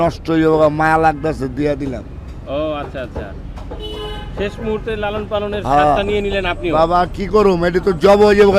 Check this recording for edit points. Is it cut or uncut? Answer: uncut